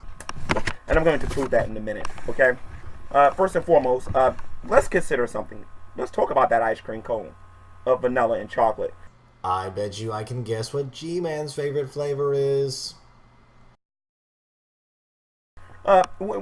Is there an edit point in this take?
no; 0 cuts

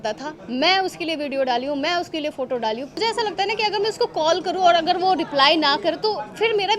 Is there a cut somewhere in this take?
yes; 1 cut; at 3.0 s

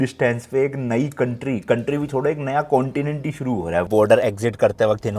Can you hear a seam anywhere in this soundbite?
yes; 1 cut; at 3.9 s

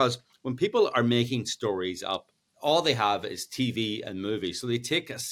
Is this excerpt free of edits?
no; 1 cut; at 2.4 s

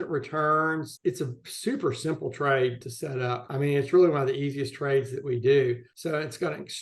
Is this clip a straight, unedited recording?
no; 1 cut; at 0.9 s

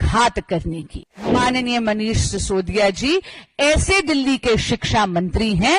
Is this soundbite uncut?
no; 1 cut; at 1.3 s

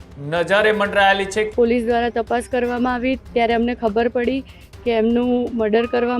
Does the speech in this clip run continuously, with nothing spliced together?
no; 1 cut; at 1.5 s

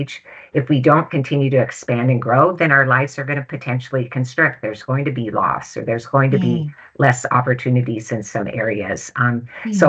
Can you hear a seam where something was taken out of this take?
no; 0 cuts

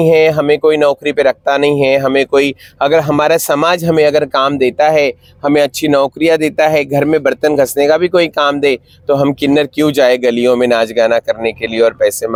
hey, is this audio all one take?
yes; 0 cuts

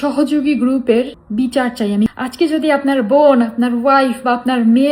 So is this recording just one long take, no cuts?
no; 2 cuts; at 1.2 s, 2.1 s

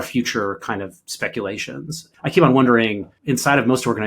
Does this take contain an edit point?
yes; 2 cuts; at 2.0 s, 3.1 s

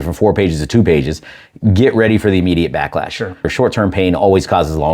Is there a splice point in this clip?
yes; 1 cut; at 3.5 s

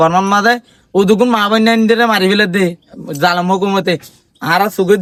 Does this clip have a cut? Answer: no; 0 cuts

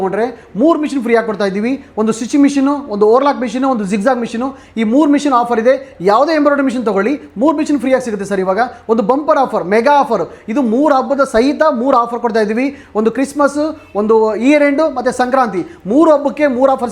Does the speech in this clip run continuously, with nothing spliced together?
yes; 0 cuts

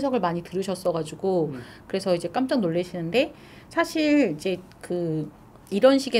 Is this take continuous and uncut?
yes; 0 cuts

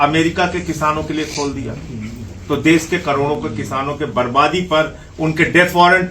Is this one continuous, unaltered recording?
yes; 0 cuts

